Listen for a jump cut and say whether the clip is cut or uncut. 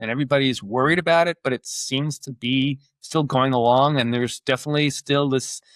uncut